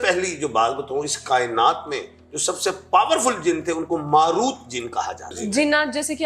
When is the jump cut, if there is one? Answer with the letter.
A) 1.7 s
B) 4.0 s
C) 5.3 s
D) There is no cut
C